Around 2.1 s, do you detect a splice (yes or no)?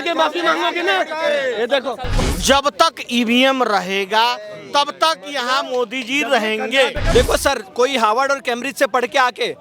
yes